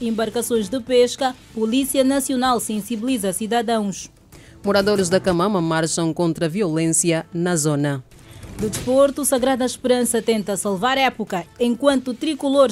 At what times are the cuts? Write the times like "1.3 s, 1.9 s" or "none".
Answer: 11.5 s

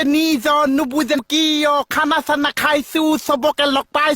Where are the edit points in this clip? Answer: 1.2 s

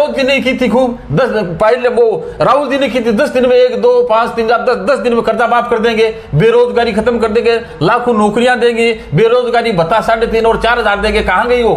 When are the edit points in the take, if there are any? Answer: none

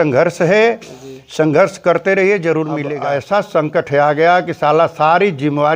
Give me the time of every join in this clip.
2.9 s

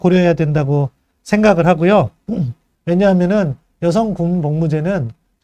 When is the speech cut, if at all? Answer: 2.7 s

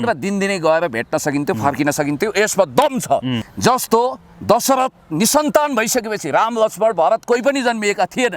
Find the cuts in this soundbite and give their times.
3.4 s

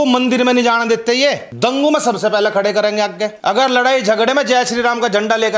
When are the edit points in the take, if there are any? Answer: 1.5 s, 3.4 s

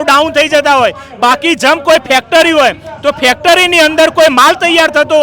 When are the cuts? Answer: none

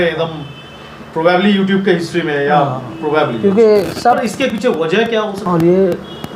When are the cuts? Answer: 5.4 s

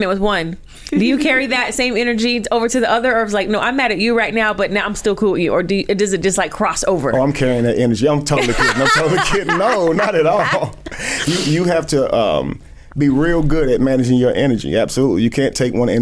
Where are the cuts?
none

